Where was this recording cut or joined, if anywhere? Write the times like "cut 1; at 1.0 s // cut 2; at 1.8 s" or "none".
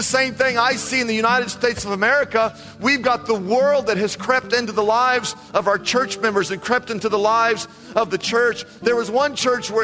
none